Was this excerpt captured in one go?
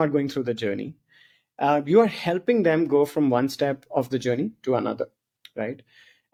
yes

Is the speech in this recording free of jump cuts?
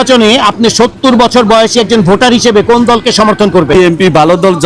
no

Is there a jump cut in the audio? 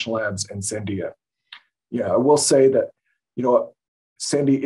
no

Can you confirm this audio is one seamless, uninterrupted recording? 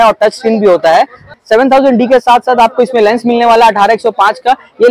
no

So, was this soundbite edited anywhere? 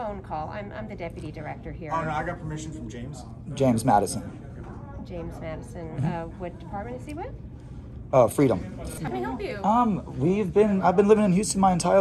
yes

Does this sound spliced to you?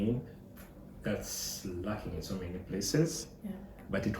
no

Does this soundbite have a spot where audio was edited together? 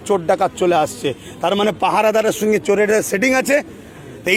no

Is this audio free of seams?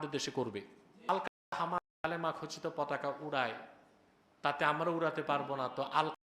no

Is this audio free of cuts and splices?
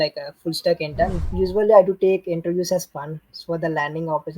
no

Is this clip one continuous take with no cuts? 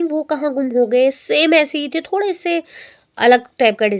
yes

